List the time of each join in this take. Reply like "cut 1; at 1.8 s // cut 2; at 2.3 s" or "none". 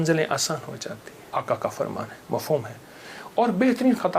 cut 1; at 1.1 s